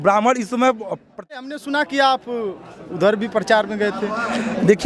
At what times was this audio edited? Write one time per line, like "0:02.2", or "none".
0:01.4